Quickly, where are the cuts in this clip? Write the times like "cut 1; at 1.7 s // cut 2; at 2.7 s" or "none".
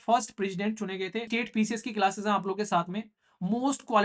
cut 1; at 1.3 s